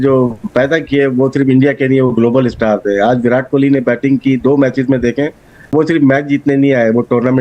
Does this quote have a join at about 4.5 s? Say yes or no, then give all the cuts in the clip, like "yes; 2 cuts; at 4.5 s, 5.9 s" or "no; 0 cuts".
no; 1 cut; at 5.7 s